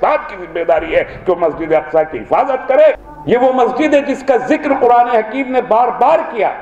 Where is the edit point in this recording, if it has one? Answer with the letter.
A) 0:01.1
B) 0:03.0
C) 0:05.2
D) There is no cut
B